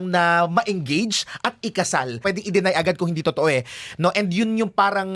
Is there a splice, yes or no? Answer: yes